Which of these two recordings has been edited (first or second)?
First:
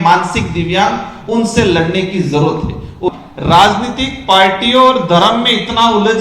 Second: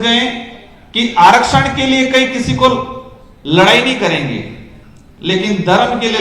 first